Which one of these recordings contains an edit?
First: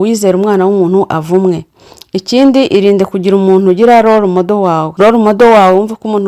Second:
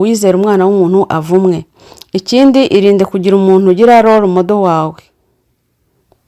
first; 1 cut; at 4.9 s

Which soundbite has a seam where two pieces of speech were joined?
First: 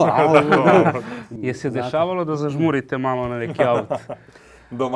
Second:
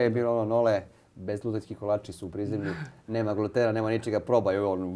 first; 1 cut; at 1.2 s

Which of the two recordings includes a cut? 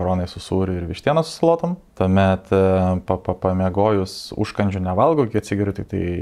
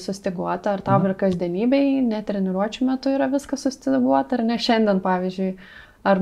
first; 1 cut; at 1.8 s

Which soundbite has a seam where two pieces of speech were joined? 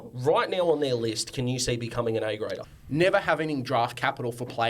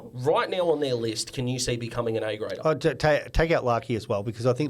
first; 1 cut; at 2.5 s

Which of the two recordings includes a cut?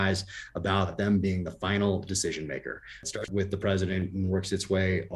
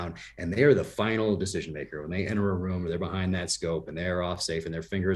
first; 2 cuts; at 0.9 s, 3.3 s

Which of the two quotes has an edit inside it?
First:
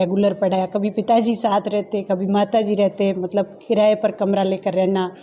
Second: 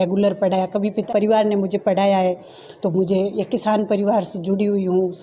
second; 1 cut; at 1.1 s

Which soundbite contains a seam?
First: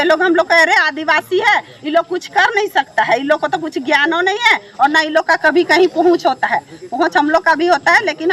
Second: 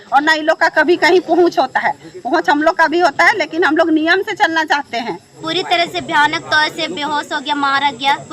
second; 1 cut; at 5.4 s

